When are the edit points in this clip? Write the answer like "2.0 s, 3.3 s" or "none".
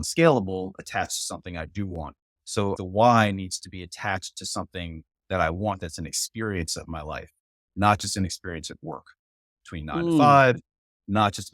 2.8 s